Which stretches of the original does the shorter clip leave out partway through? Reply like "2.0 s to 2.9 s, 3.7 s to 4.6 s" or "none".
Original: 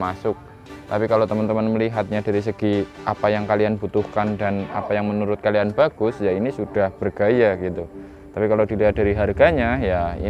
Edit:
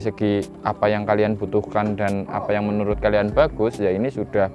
none

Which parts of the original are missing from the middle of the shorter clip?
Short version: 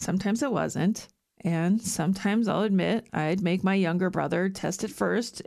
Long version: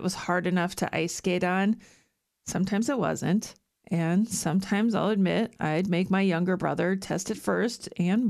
none

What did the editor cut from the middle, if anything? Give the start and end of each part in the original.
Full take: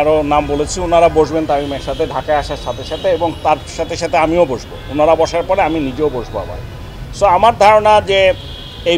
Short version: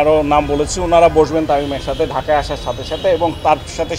none

